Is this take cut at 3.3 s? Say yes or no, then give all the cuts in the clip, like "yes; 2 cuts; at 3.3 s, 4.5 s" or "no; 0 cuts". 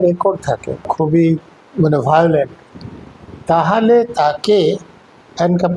no; 2 cuts; at 0.9 s, 1.6 s